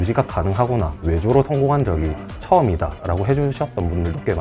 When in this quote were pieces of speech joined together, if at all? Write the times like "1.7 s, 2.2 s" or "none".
1.0 s